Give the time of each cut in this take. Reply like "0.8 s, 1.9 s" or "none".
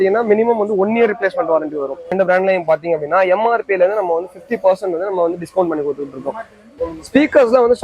2.1 s, 6.8 s